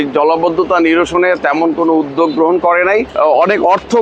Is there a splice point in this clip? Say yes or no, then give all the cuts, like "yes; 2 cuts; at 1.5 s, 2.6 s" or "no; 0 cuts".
yes; 1 cut; at 3.1 s